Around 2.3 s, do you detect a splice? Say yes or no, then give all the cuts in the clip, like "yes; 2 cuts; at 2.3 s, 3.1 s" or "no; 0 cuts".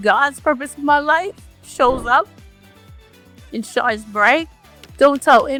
no; 0 cuts